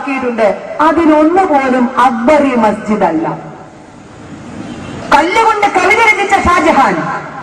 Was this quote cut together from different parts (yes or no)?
yes